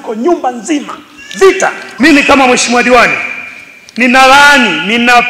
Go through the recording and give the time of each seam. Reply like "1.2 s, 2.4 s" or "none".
1.8 s